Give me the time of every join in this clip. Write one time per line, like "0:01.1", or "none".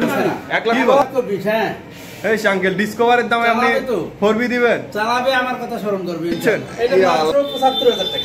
0:01.0
0:07.3